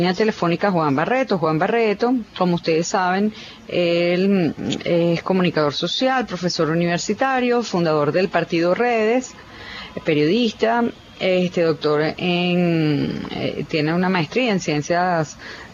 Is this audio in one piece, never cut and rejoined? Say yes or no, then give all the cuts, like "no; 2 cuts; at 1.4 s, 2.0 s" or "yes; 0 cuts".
yes; 0 cuts